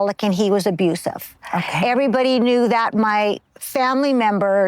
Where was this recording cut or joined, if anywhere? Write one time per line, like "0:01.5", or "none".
0:03.4